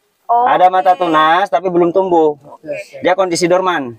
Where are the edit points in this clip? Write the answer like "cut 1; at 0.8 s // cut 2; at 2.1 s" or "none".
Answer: none